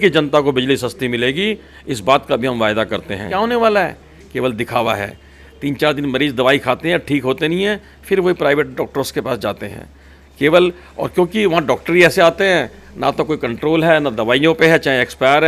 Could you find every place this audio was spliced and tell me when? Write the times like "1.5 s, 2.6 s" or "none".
3.3 s